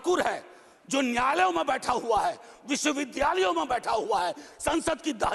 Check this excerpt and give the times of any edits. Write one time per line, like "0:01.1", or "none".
none